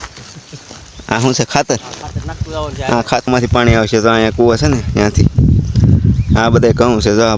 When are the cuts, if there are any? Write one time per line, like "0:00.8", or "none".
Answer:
0:03.3